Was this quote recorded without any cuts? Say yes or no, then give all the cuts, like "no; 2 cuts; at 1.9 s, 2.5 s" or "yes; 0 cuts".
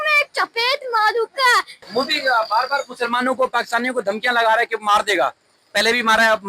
yes; 0 cuts